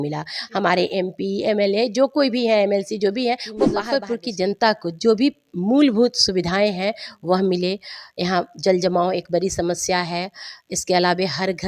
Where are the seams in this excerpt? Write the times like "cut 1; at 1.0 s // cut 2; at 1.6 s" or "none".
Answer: cut 1; at 3.6 s

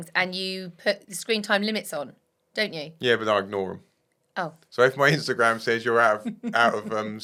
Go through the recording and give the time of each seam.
none

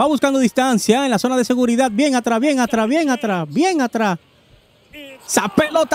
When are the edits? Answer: none

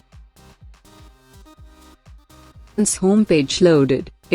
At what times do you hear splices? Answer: cut 1; at 2.8 s

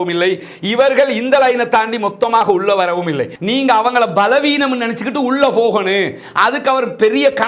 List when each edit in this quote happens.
cut 1; at 3.3 s

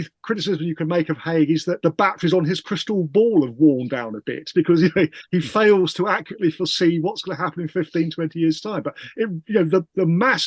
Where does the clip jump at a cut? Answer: cut 1; at 1.8 s

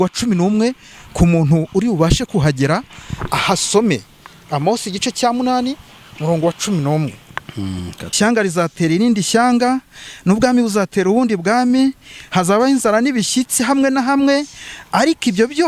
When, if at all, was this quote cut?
cut 1; at 8.2 s

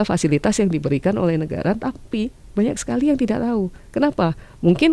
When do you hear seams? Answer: none

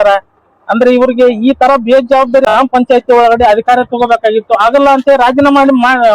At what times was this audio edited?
cut 1; at 2.4 s

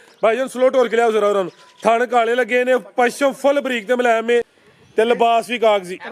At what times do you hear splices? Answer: cut 1; at 4.6 s

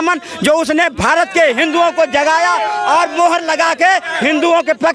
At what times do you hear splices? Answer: none

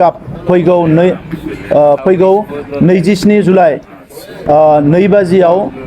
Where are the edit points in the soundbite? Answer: cut 1; at 4.0 s

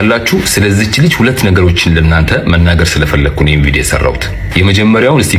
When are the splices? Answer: none

